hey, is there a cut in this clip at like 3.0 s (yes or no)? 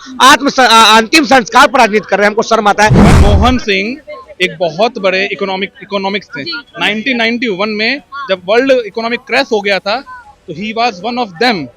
yes